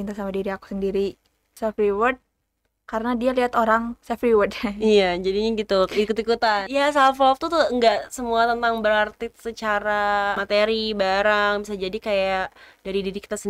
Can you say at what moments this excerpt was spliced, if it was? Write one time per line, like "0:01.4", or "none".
0:01.6
0:06.6
0:10.4